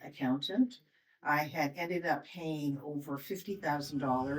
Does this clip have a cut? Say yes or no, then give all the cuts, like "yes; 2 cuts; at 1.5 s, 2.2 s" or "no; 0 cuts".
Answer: no; 0 cuts